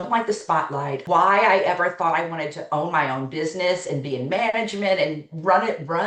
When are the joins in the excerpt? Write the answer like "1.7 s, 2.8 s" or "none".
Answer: 1.0 s